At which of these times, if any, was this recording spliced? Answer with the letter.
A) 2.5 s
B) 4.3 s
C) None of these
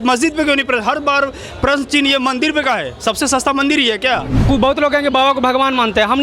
B